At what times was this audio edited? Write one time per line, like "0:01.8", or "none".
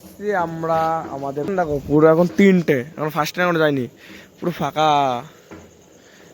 0:01.5